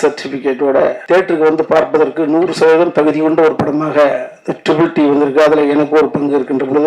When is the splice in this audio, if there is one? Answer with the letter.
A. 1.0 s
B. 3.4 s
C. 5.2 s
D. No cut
A